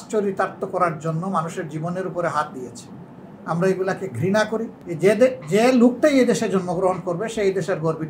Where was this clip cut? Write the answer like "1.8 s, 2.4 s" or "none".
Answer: 4.8 s